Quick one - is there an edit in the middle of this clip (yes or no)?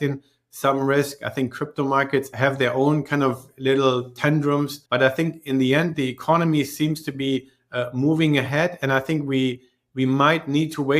yes